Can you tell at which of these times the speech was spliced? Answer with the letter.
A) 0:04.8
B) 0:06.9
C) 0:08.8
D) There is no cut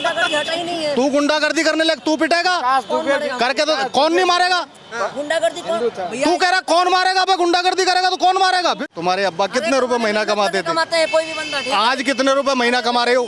C